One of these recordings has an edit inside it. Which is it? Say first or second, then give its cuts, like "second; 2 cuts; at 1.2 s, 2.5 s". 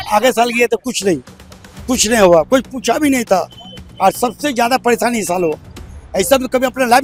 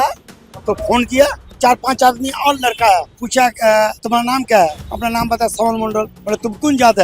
second; 5 cuts; at 1.6 s, 3.2 s, 4.0 s, 4.9 s, 6.2 s